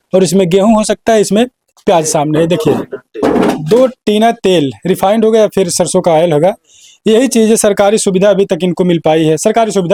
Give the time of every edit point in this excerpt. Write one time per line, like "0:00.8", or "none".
none